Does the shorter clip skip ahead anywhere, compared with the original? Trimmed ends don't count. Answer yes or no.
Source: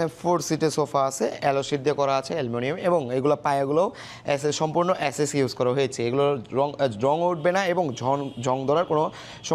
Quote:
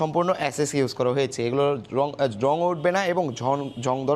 no